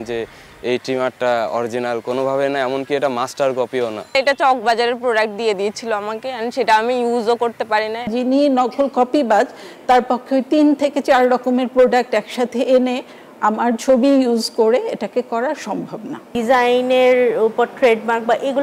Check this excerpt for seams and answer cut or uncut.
cut